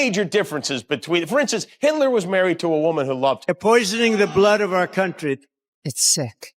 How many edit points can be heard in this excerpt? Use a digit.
1